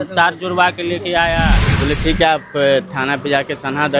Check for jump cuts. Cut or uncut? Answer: cut